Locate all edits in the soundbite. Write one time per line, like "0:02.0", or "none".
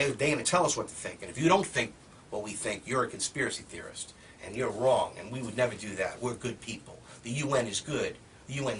0:03.7